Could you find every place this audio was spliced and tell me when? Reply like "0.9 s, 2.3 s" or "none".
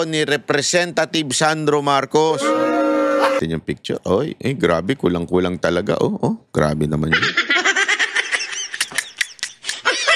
3.4 s